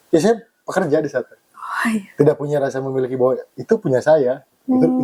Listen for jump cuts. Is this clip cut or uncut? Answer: uncut